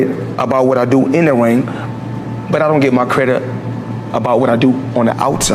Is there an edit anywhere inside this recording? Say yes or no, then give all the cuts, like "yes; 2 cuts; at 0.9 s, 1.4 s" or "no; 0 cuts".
no; 0 cuts